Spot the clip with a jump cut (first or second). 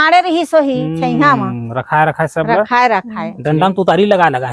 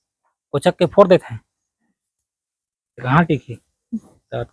first